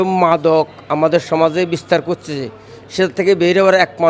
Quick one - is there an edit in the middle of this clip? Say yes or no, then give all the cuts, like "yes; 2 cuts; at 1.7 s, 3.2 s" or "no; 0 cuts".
no; 0 cuts